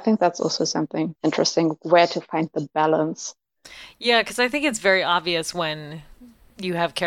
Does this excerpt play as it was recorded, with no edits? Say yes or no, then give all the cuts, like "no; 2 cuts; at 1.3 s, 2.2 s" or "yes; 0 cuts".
no; 1 cut; at 1.1 s